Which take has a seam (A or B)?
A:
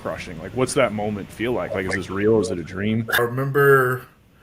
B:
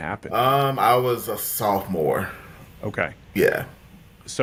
A